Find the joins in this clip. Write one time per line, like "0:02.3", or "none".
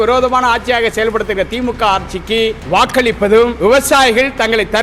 0:02.6
0:03.5